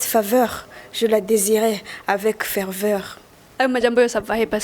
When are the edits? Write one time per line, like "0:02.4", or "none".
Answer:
0:03.4